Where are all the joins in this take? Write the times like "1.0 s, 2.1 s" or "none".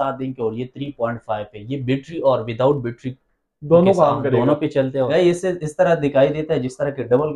5.1 s

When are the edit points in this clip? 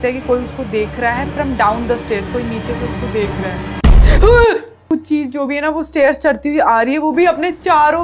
4.9 s

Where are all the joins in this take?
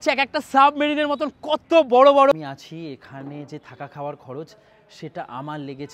2.3 s

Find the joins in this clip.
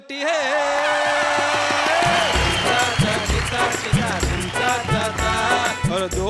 2.5 s

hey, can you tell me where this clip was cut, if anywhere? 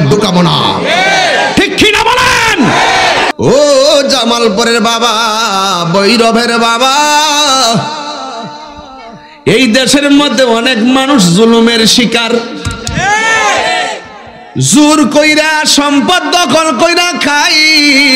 3.3 s

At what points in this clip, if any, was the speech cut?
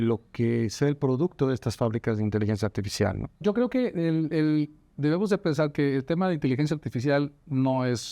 3.4 s

